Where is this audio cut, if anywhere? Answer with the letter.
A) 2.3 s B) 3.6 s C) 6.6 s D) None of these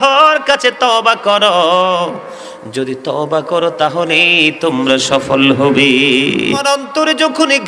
C